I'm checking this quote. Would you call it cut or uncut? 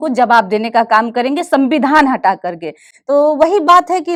uncut